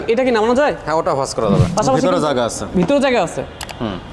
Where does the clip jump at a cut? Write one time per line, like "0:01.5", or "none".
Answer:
0:01.7